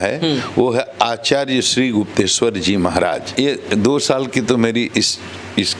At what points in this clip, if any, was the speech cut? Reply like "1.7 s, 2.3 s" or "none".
3.3 s